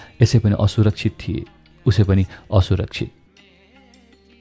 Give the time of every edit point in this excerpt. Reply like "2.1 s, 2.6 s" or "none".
3.2 s